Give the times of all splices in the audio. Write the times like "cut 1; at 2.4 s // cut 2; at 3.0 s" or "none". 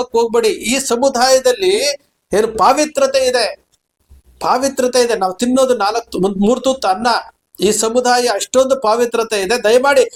none